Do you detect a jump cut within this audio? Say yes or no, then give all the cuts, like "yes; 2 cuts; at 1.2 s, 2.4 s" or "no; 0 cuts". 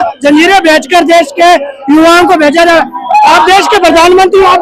no; 0 cuts